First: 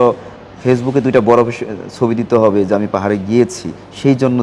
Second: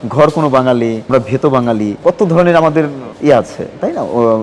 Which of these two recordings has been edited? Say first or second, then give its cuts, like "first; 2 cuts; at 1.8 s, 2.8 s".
second; 3 cuts; at 1.1 s, 2.0 s, 3.0 s